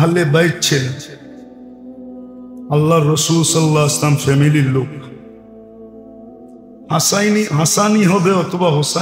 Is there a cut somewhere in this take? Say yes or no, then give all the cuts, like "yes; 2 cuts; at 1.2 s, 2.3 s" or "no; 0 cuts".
no; 0 cuts